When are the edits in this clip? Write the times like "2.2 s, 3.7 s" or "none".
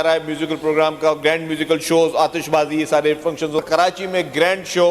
3.6 s